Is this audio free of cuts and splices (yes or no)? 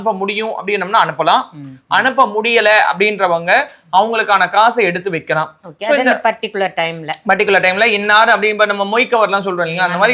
yes